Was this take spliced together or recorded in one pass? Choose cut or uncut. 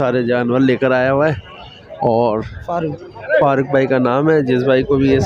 cut